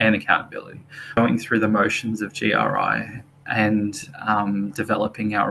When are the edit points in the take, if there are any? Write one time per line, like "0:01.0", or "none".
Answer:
0:01.2